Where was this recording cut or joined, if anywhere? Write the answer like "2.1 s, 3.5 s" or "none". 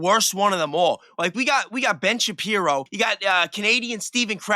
2.9 s